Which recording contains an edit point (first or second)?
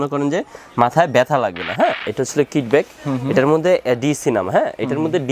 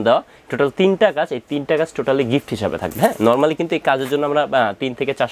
first